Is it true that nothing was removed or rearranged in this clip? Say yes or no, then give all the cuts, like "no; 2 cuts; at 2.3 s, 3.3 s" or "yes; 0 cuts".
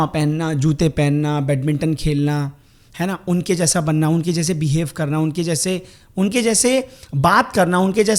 yes; 0 cuts